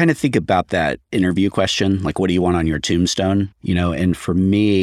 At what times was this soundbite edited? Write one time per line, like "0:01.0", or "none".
0:01.0
0:03.6